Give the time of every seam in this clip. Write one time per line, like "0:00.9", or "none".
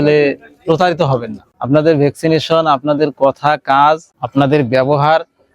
0:01.5